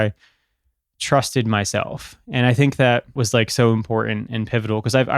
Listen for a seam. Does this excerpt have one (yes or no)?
yes